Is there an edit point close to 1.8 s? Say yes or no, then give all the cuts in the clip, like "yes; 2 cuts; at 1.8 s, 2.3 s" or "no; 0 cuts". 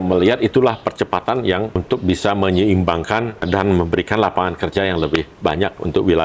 yes; 3 cuts; at 1.8 s, 3.4 s, 5.3 s